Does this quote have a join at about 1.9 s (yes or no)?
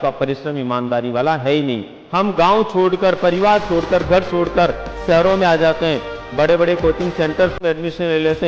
yes